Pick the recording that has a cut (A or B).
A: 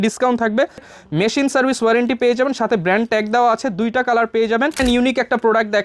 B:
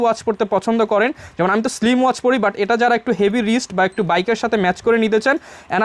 A